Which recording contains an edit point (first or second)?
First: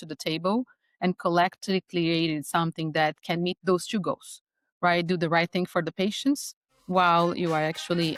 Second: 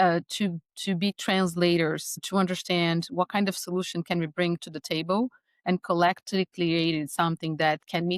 second